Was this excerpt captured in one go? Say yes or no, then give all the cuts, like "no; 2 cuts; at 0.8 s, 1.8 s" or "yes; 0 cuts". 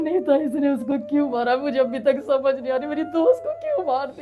yes; 0 cuts